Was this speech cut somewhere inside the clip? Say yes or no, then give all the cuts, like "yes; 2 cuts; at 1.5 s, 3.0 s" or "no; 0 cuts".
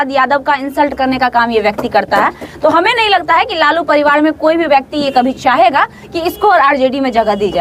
no; 0 cuts